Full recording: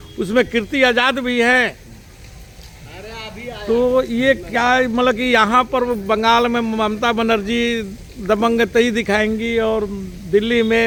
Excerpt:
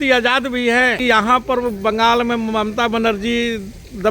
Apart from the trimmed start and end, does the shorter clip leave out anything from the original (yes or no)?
yes